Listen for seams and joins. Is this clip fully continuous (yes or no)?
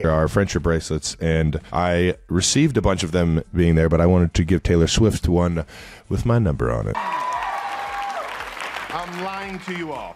yes